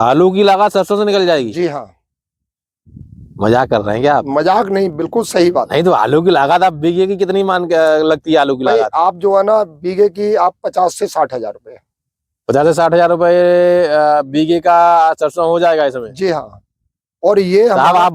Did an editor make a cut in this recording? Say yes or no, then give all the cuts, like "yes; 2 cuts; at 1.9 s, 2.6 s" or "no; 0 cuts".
no; 0 cuts